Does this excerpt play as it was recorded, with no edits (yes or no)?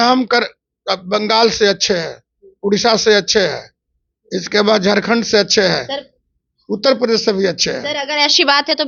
yes